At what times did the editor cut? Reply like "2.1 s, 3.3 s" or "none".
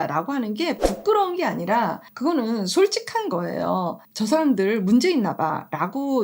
2.1 s, 4.0 s